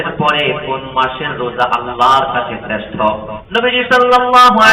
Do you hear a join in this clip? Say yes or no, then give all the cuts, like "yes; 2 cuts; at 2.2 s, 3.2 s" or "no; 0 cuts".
yes; 1 cut; at 3.3 s